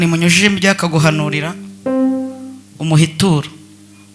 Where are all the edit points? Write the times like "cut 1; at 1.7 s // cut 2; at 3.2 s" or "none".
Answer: none